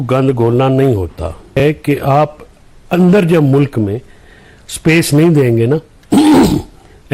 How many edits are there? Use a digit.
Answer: 1